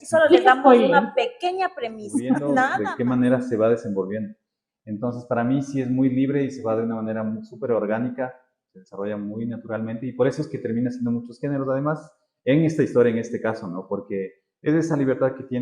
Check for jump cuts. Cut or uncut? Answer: cut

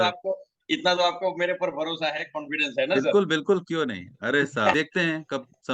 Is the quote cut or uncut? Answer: cut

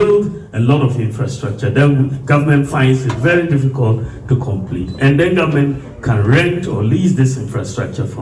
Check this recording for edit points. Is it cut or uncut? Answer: uncut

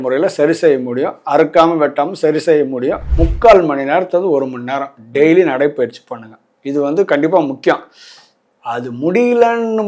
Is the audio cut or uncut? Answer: cut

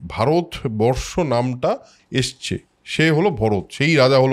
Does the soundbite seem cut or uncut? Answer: uncut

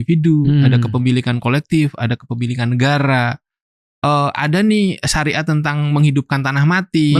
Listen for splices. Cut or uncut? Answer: uncut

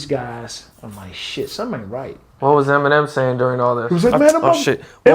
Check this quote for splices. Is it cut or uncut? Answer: cut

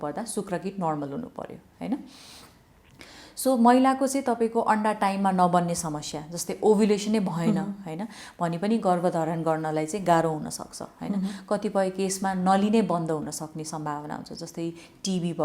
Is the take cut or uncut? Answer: uncut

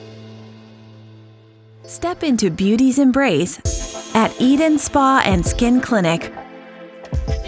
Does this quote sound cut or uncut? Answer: cut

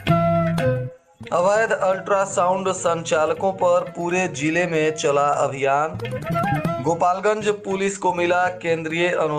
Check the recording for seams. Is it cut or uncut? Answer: cut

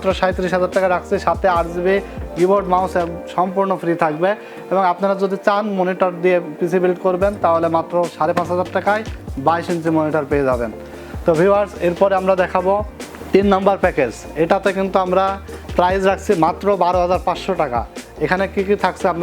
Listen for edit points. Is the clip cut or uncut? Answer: uncut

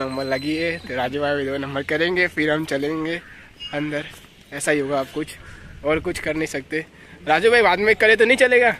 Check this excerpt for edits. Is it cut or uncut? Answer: uncut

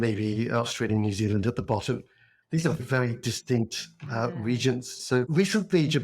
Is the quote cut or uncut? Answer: cut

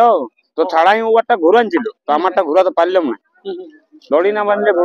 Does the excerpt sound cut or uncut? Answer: uncut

